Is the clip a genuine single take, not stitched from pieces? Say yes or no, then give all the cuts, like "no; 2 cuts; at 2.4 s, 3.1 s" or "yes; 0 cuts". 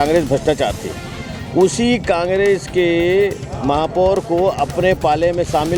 yes; 0 cuts